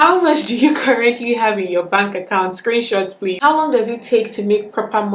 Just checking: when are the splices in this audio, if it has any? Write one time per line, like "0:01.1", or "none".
0:03.4